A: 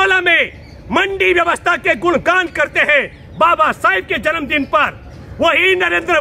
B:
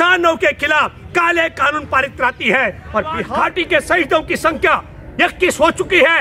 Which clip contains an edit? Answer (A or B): B